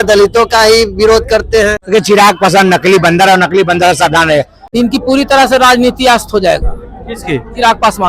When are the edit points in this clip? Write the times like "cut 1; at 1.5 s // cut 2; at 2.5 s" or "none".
cut 1; at 1.8 s // cut 2; at 4.6 s